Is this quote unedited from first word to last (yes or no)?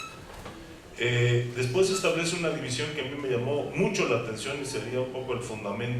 yes